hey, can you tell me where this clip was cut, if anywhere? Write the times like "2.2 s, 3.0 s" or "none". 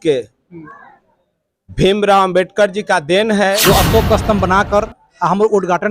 3.6 s